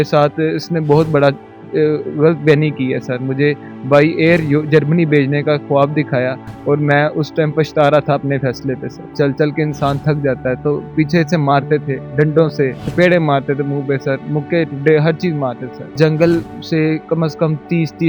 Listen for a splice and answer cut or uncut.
cut